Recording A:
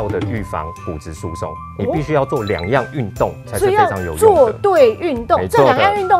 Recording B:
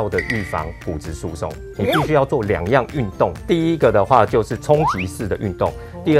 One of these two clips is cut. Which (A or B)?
B